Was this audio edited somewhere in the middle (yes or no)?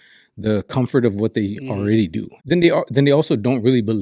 yes